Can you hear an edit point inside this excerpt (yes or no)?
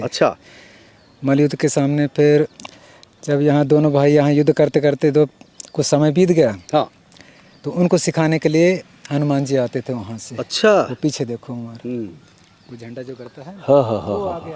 no